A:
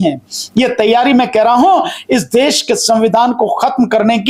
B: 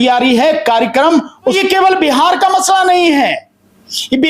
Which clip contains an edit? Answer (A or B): B